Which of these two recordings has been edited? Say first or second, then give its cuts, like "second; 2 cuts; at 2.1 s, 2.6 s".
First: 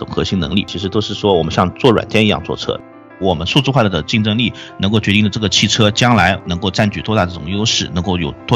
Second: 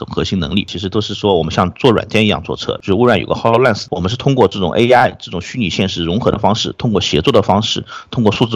first; 1 cut; at 2.8 s